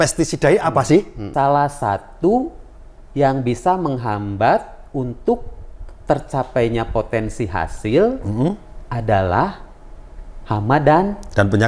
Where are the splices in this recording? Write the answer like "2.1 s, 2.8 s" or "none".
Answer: 1.2 s